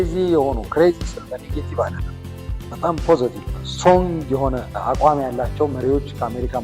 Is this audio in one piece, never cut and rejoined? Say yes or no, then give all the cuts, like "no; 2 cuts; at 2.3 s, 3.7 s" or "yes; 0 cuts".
no; 2 cuts; at 3.5 s, 4.7 s